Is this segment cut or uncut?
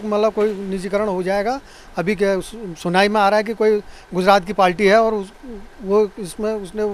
uncut